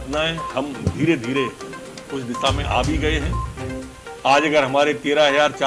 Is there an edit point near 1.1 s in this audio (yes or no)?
no